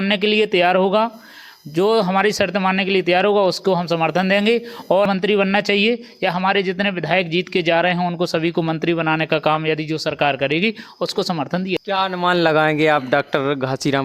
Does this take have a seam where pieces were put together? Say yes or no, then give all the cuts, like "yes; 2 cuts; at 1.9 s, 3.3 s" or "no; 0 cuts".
yes; 2 cuts; at 5.1 s, 11.8 s